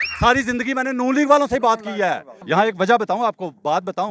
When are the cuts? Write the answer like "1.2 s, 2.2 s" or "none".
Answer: 2.3 s